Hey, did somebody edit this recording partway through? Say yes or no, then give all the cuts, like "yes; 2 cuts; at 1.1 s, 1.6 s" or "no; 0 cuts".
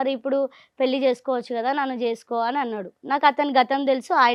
no; 0 cuts